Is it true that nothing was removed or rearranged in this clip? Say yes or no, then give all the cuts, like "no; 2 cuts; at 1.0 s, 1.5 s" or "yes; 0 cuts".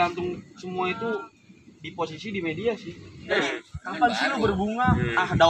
no; 1 cut; at 3.3 s